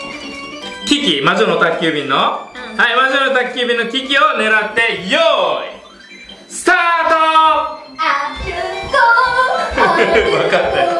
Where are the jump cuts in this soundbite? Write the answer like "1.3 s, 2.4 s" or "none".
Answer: none